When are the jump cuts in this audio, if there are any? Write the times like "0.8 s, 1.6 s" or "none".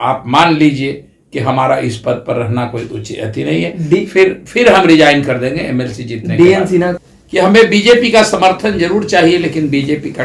6.9 s

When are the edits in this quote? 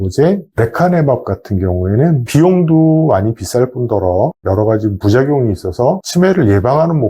none

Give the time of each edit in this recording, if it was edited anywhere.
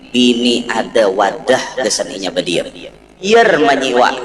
3.3 s

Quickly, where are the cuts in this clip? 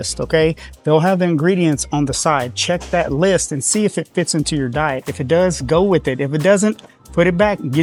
none

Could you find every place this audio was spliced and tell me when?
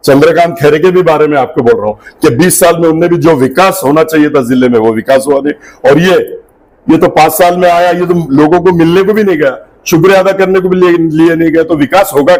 none

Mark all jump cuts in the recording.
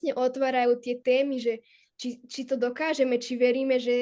none

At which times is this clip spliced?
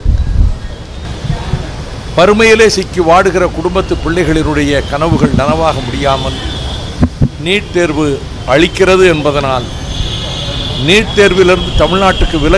1.0 s

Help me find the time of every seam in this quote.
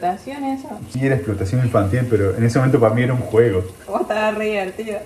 none

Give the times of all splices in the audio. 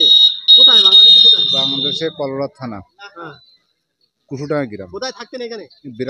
none

